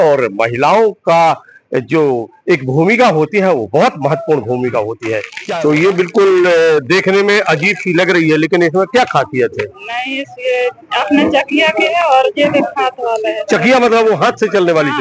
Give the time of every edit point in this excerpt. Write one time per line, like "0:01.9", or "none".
0:05.3